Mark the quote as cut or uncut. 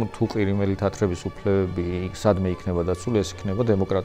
uncut